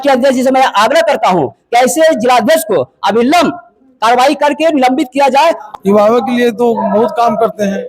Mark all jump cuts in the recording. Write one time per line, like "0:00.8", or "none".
0:05.6